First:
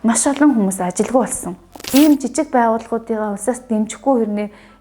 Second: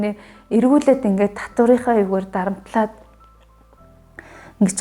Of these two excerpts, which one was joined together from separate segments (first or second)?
first